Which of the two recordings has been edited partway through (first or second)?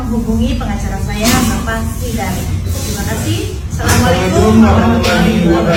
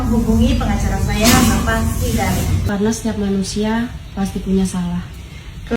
second